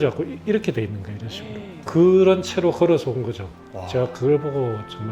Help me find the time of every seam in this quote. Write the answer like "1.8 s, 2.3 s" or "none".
1.7 s